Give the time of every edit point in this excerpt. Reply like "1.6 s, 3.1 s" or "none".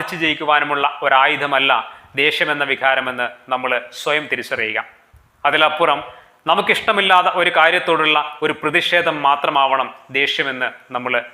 none